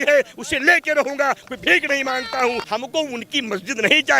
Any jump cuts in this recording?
yes; 1 cut; at 2.6 s

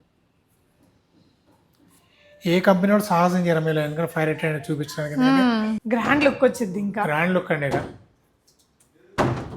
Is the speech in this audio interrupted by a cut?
yes; 1 cut; at 5.8 s

